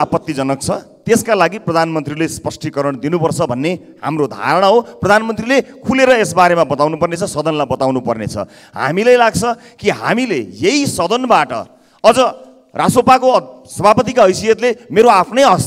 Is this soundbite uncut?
yes; 0 cuts

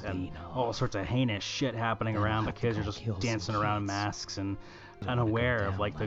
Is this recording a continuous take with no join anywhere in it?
no; 1 cut; at 5.0 s

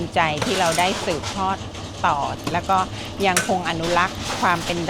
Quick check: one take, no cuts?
no; 1 cut; at 2.4 s

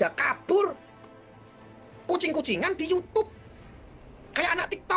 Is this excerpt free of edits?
yes; 0 cuts

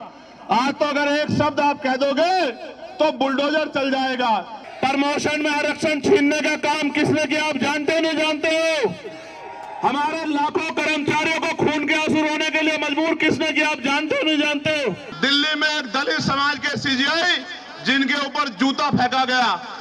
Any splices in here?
yes; 2 cuts; at 4.6 s, 15.1 s

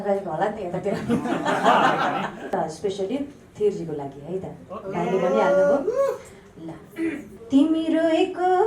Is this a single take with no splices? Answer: no; 2 cuts; at 2.5 s, 7.3 s

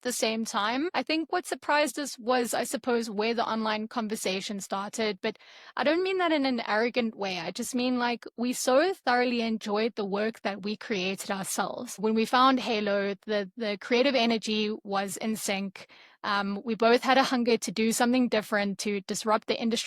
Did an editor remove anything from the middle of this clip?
yes; 2 cuts; at 0.9 s, 12.0 s

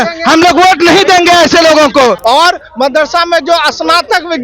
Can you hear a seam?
yes; 1 cut; at 2.2 s

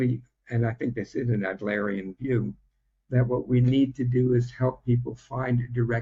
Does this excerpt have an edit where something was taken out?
no; 0 cuts

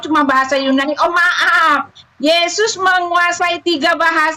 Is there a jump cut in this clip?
no; 0 cuts

